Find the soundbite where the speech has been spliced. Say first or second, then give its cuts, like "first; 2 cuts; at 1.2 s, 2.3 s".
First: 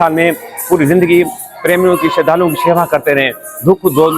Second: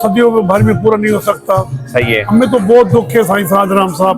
second; 1 cut; at 2.2 s